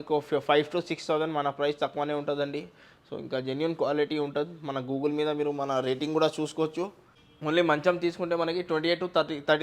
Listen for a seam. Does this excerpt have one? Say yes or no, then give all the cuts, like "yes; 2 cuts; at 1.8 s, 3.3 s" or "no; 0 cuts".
yes; 1 cut; at 7.2 s